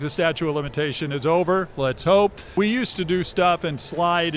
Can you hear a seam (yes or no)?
yes